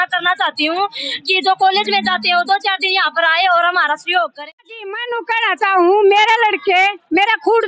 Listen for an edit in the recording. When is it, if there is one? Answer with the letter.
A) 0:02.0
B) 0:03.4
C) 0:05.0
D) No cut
C